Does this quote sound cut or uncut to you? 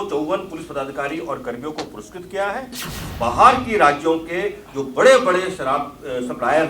cut